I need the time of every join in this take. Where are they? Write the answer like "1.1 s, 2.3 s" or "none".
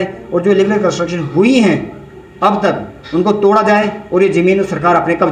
none